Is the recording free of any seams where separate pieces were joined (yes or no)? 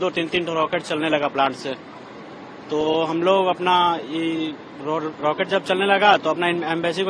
yes